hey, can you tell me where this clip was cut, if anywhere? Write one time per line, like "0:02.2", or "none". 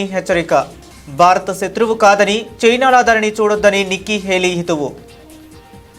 none